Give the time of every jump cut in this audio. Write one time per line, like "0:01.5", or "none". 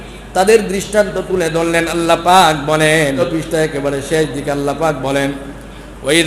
0:03.2